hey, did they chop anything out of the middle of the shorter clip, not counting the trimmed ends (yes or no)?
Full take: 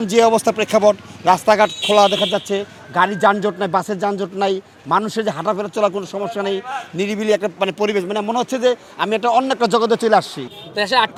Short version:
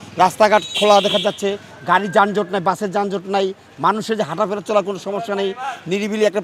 no